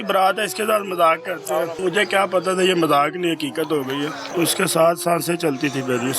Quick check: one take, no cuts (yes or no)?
no